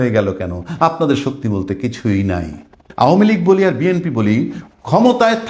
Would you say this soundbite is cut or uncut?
cut